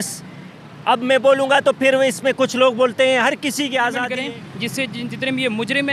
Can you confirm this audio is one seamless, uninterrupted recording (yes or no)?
no